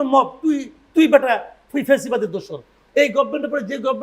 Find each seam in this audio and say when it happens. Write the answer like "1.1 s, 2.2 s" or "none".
2.7 s